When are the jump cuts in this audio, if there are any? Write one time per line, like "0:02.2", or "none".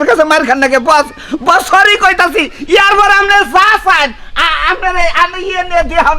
none